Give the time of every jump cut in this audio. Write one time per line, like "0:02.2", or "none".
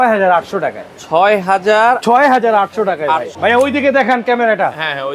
0:03.3